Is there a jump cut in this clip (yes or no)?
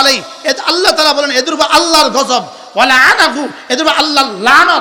no